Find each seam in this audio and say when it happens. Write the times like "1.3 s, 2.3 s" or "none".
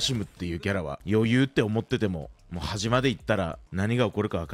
1.0 s, 3.6 s